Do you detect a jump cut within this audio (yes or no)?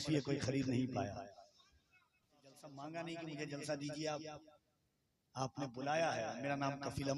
yes